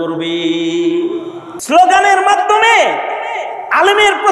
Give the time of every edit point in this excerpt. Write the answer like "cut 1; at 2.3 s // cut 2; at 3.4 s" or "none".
cut 1; at 1.5 s